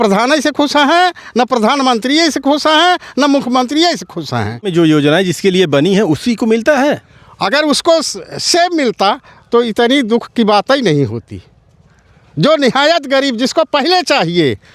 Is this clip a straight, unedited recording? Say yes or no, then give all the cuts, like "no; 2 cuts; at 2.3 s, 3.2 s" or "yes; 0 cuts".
no; 1 cut; at 4.7 s